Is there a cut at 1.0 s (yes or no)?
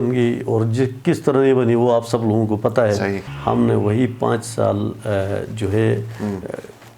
no